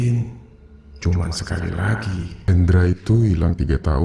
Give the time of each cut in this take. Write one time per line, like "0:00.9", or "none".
0:02.3